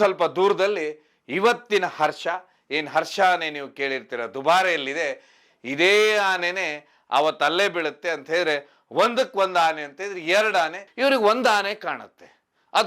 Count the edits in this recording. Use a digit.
1